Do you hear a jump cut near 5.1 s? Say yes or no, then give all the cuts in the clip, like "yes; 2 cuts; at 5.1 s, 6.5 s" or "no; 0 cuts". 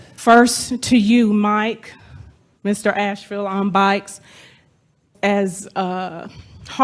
yes; 1 cut; at 5.1 s